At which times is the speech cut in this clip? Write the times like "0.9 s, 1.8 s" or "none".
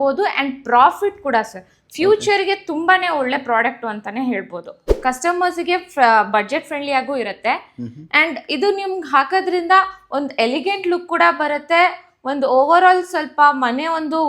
4.8 s